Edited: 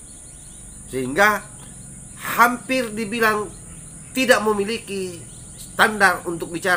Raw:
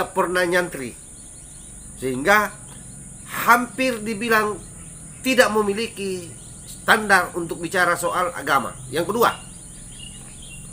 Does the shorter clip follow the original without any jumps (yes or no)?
yes